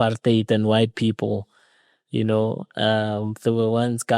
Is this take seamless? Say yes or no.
yes